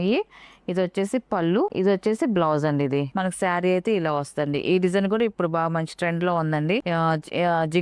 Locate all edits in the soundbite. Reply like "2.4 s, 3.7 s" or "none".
1.7 s, 3.1 s, 6.8 s